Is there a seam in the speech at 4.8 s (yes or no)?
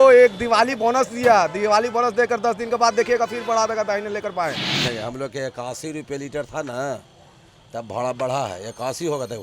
yes